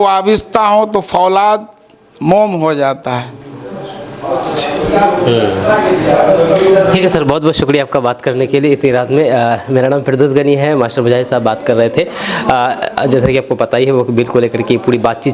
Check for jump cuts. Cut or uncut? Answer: uncut